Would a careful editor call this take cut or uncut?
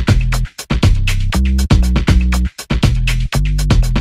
cut